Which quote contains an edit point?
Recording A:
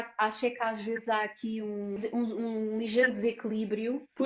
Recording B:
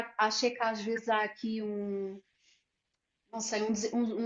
A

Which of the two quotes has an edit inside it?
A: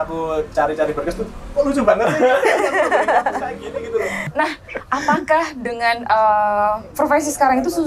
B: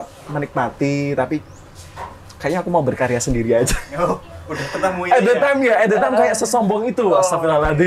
A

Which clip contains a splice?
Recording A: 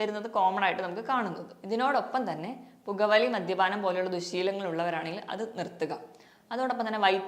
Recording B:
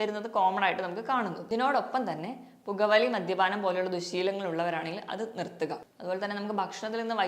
B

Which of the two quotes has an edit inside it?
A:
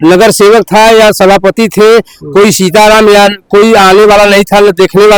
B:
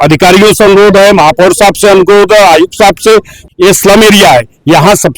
B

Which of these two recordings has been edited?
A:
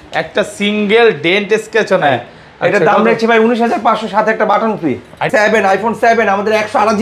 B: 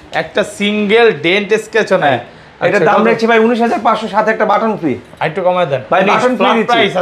A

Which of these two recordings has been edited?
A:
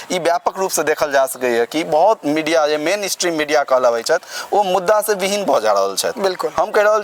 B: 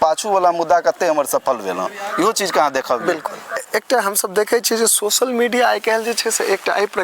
B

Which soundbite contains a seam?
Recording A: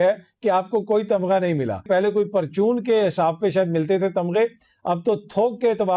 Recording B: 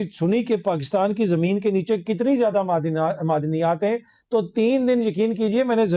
A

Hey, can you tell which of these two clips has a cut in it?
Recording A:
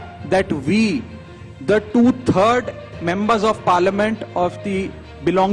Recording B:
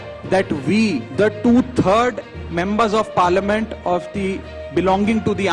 B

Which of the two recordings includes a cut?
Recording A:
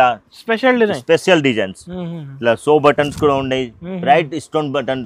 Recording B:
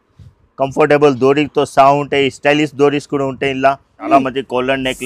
B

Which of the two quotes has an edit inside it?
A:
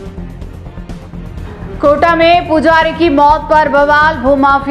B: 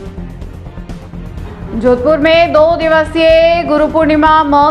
B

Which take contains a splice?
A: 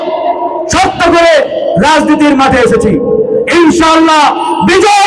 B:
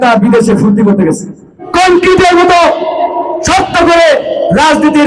B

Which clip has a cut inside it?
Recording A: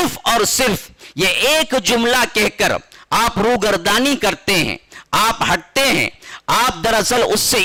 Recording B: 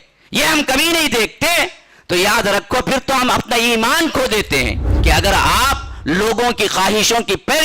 B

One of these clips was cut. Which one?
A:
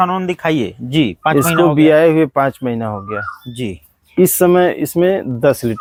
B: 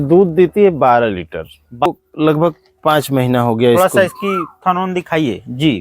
B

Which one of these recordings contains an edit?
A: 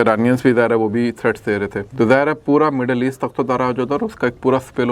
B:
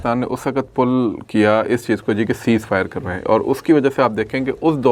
A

